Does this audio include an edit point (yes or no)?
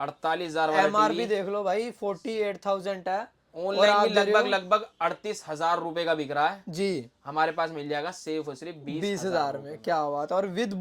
no